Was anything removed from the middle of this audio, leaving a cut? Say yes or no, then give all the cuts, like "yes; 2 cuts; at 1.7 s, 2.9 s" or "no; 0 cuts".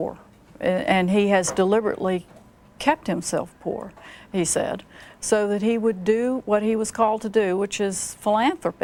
no; 0 cuts